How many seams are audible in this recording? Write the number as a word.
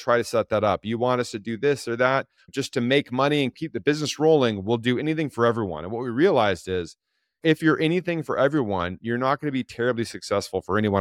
two